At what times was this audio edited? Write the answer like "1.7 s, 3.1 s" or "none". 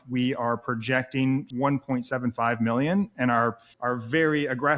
1.5 s, 3.7 s